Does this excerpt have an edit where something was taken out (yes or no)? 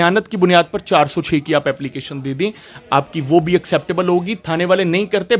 no